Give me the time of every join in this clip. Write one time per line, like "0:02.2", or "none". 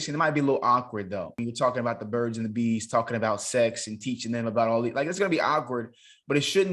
0:01.4